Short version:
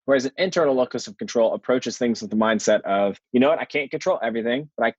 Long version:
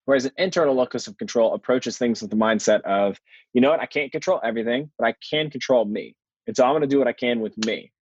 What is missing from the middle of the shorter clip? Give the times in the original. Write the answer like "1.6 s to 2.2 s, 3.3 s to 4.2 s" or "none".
3.2 s to 3.4 s